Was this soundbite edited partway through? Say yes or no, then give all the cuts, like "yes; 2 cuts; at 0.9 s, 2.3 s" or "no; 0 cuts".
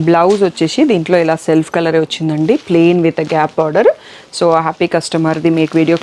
no; 0 cuts